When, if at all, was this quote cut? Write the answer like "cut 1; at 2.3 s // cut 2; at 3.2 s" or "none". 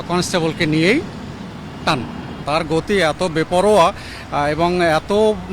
cut 1; at 2.4 s